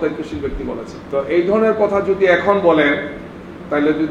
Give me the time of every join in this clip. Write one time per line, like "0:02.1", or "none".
0:00.9